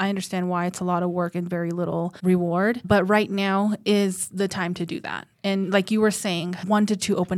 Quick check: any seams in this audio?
yes; 3 cuts; at 2.1 s, 2.8 s, 6.6 s

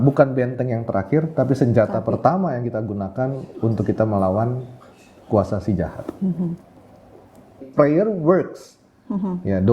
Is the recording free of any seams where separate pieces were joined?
no; 1 cut; at 7.7 s

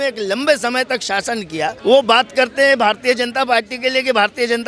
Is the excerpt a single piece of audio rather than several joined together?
no; 1 cut; at 1.8 s

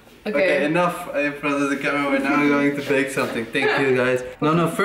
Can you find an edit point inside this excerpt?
no; 0 cuts

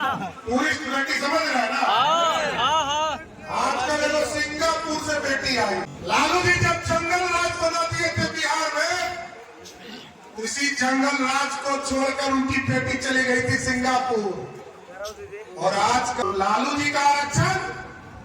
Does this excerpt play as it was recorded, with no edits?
no; 2 cuts; at 5.9 s, 16.2 s

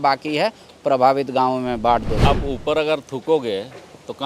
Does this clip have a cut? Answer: yes; 1 cut; at 2.1 s

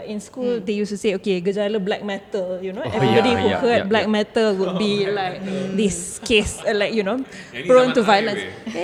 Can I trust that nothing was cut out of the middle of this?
yes; 0 cuts

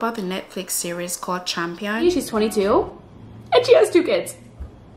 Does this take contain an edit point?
yes; 1 cut; at 2.0 s

